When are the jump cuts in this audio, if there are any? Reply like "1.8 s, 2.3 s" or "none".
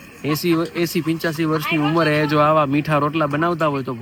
none